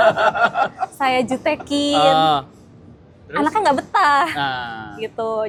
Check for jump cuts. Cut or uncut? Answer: uncut